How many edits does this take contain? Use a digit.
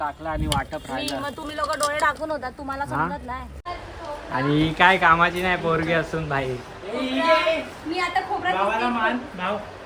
1